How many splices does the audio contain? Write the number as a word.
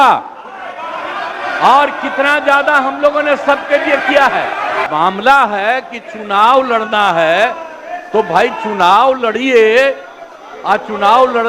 one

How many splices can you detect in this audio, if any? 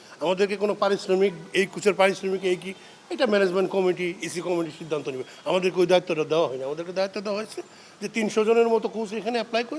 zero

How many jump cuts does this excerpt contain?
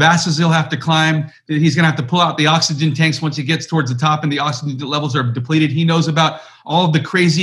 zero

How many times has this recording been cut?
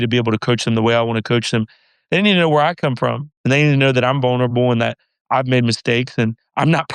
zero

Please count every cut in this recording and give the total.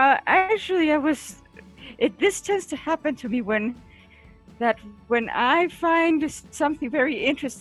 zero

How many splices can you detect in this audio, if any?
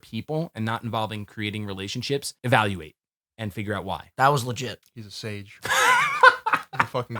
two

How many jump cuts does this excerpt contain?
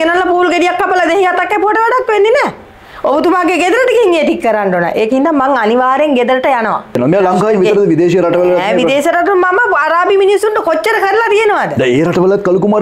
one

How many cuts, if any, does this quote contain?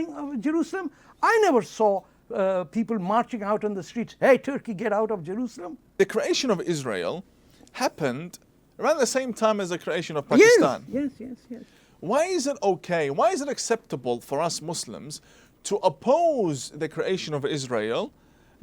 one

